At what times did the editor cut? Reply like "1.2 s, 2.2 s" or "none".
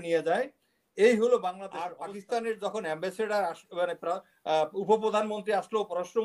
1.9 s